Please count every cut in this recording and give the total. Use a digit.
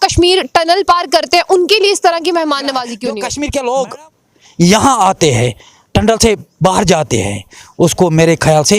1